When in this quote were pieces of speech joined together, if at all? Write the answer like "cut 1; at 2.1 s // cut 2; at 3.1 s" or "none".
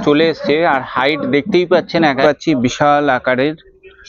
cut 1; at 2.2 s